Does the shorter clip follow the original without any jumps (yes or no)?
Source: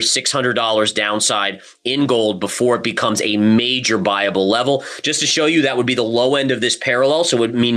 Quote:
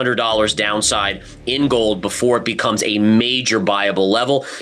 yes